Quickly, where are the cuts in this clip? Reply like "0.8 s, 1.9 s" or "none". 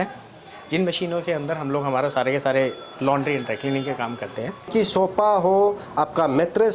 4.7 s